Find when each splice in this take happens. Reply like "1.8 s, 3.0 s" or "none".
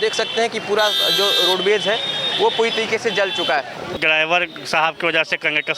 3.9 s